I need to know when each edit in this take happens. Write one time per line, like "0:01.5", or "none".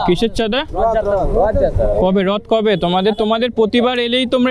none